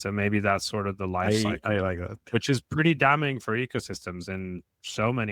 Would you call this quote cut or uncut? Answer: uncut